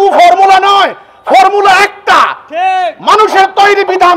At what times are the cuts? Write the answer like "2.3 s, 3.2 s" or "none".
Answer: none